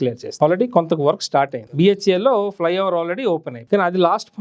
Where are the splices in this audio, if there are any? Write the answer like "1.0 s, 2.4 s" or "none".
1.6 s, 3.5 s

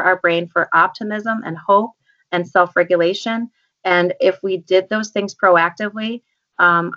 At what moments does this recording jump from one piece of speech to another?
none

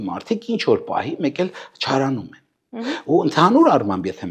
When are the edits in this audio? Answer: none

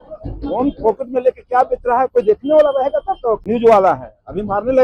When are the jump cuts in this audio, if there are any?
3.4 s

